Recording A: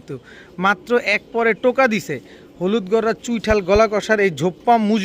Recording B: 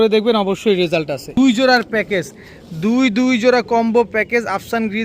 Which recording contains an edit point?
B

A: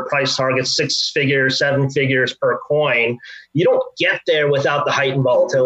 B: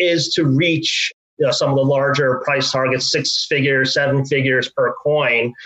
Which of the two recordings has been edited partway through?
B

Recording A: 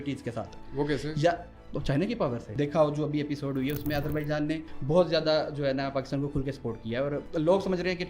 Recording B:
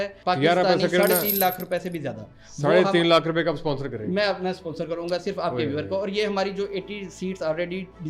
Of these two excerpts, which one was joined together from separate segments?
A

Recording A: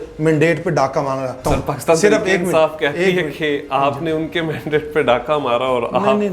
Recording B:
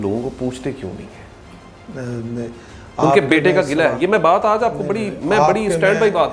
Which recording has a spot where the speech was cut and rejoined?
A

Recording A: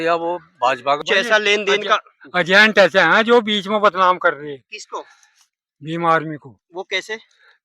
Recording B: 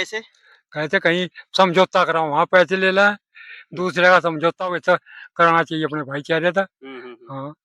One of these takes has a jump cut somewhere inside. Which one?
A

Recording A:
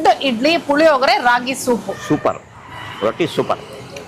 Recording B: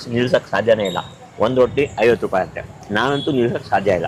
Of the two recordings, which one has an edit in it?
A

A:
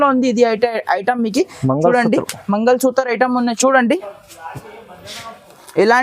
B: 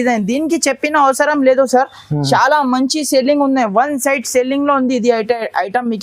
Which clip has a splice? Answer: A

